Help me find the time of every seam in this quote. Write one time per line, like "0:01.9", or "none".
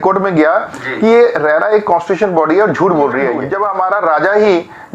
0:03.5